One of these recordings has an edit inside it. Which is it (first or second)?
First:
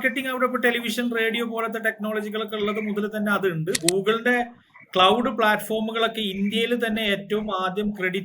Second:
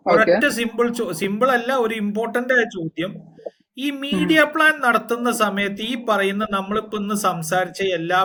first